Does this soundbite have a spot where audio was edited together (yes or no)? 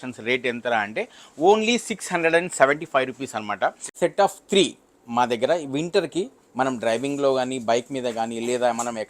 yes